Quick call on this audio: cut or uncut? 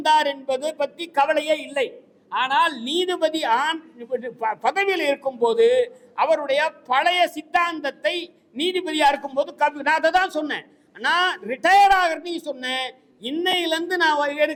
uncut